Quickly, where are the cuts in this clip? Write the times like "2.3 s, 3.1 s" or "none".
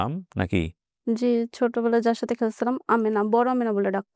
none